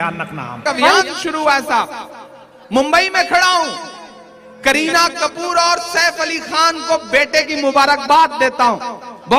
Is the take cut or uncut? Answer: cut